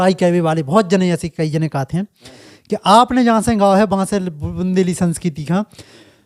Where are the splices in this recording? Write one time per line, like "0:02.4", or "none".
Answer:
none